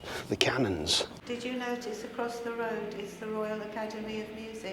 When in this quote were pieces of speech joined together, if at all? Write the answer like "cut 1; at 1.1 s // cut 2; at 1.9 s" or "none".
cut 1; at 1.1 s